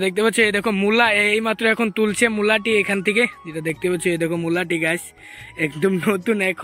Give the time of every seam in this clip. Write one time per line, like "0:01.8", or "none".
none